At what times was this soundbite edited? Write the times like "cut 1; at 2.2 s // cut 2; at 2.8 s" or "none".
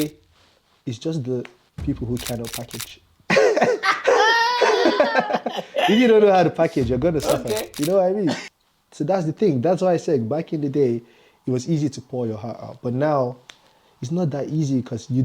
cut 1; at 8.4 s